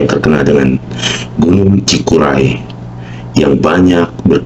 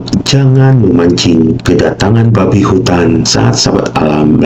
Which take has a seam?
second; 2 cuts; at 1.6 s, 3.3 s

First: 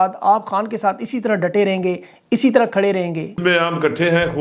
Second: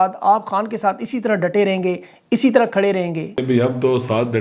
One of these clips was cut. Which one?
first; 1 cut; at 3.4 s

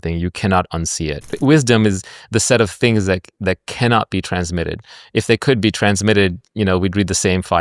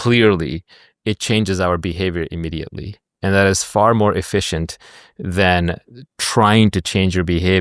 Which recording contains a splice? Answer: first; 1 cut; at 1.4 s

